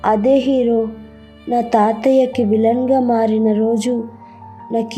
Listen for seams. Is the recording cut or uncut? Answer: uncut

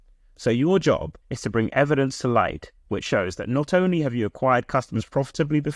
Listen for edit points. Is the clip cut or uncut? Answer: cut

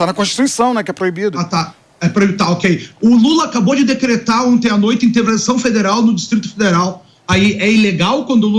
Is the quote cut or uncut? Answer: uncut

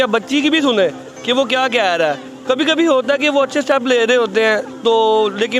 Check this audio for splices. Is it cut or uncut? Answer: uncut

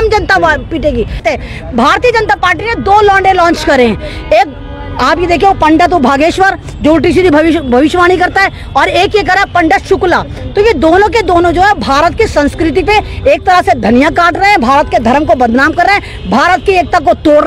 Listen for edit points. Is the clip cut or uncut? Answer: cut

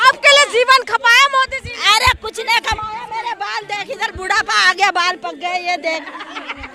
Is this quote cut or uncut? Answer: uncut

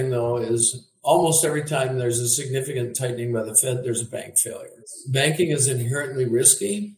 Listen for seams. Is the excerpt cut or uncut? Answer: uncut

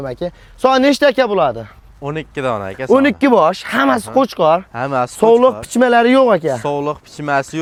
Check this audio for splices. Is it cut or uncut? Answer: uncut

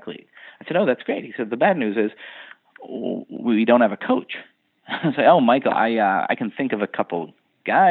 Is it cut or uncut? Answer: uncut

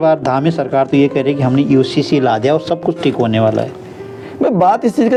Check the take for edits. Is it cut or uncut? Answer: uncut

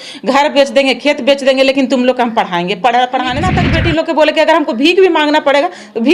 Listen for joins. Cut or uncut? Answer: cut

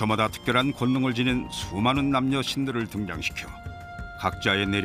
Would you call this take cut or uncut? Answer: cut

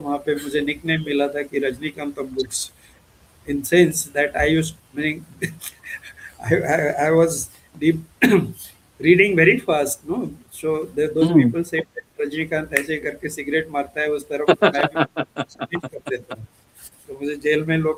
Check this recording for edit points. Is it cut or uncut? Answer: uncut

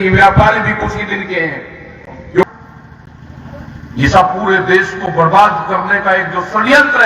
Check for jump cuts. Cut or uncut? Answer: cut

